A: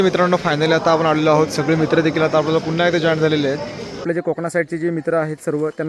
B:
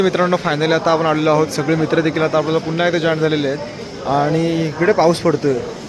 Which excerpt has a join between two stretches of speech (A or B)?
A